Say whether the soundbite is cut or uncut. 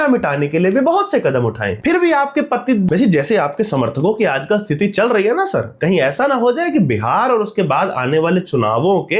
cut